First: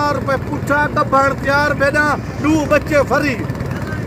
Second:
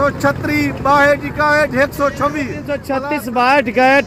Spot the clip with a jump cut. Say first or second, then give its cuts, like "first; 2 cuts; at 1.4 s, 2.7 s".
second; 1 cut; at 2.8 s